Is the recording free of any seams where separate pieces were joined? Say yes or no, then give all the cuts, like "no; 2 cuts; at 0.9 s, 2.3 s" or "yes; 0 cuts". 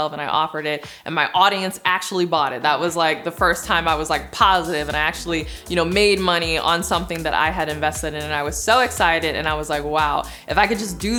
yes; 0 cuts